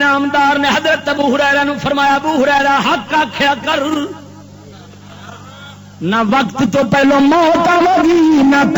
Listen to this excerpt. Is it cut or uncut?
uncut